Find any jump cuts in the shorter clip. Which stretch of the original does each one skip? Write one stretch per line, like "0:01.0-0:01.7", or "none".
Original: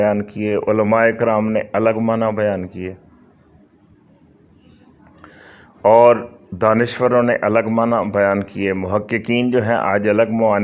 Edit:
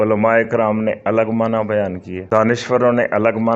0:02.8-0:06.4